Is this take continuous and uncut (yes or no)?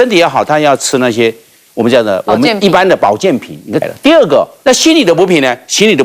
no